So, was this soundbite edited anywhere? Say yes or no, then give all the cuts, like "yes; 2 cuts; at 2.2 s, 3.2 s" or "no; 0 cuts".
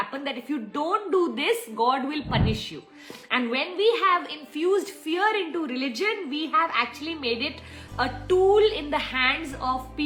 no; 0 cuts